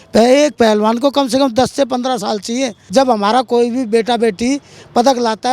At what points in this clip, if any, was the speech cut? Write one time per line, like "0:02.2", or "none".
0:02.8

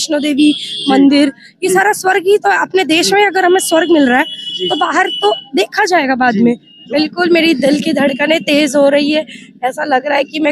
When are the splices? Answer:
0:06.7

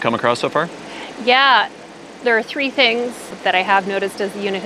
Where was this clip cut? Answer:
0:03.4

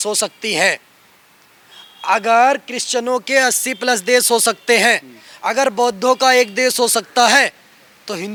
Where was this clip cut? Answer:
none

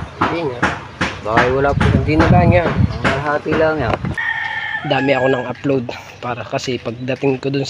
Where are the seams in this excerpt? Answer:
0:04.2

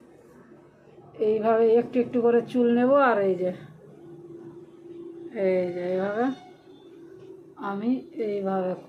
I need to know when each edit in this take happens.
none

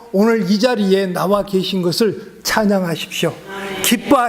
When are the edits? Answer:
none

